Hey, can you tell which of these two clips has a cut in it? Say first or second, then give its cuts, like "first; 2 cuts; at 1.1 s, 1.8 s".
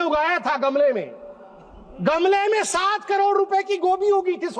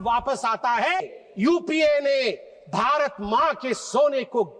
second; 1 cut; at 1.0 s